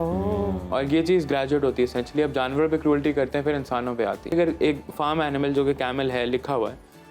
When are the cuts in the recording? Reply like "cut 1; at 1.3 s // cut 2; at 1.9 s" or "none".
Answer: cut 1; at 4.3 s